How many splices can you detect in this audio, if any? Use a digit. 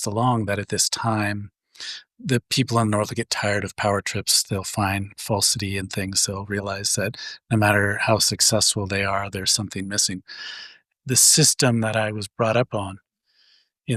1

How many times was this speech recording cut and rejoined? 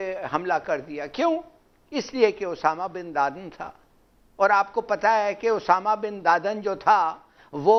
0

